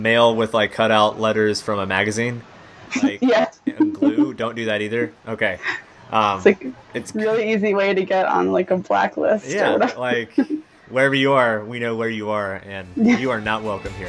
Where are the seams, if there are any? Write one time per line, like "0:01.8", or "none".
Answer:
none

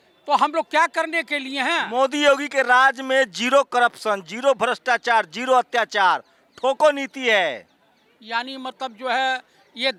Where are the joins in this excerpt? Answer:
none

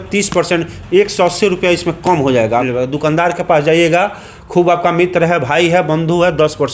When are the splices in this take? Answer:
0:02.7

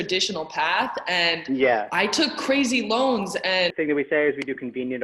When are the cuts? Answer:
0:03.7

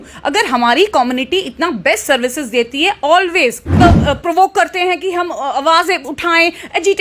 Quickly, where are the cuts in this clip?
0:03.8

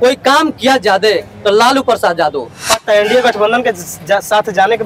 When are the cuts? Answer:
0:02.8

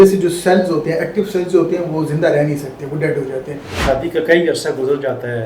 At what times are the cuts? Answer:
0:03.7

